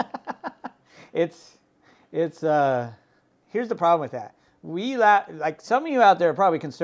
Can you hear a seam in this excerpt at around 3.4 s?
yes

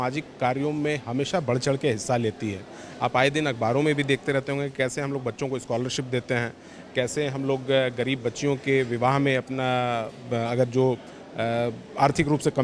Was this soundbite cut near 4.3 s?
no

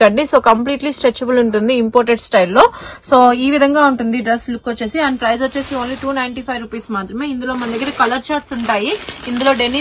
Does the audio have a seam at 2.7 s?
no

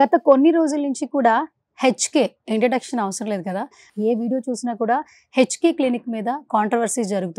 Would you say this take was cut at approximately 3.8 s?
yes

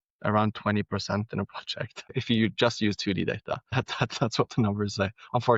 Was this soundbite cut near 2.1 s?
yes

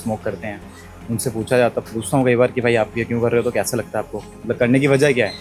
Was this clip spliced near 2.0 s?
no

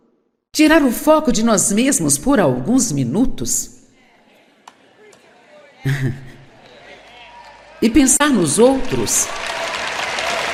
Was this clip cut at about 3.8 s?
no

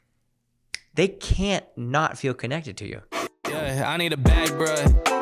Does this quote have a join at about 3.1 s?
yes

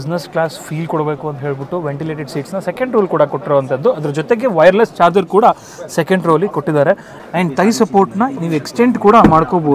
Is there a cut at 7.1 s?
yes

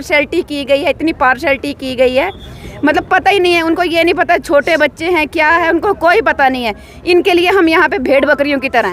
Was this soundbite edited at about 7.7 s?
no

